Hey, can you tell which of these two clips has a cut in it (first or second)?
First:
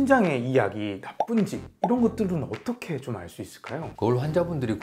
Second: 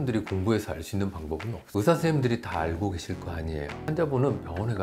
second